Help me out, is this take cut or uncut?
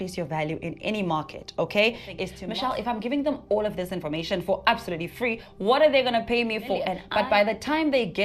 cut